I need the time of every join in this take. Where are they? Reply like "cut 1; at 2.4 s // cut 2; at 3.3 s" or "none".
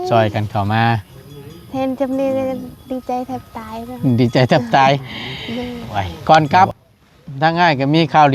cut 1; at 6.1 s